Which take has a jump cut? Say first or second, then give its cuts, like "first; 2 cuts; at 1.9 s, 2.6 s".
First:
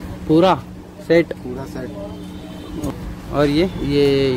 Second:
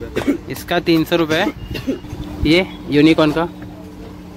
first; 1 cut; at 3.0 s